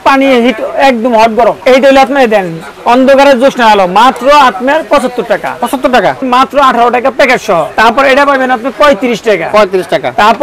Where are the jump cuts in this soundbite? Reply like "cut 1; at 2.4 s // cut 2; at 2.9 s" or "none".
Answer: cut 1; at 1.6 s // cut 2; at 6.2 s // cut 3; at 7.7 s